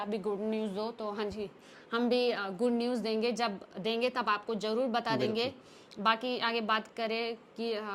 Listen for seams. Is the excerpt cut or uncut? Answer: uncut